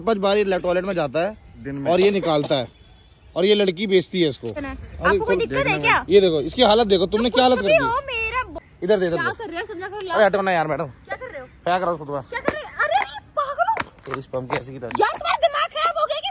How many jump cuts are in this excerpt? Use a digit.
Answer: 2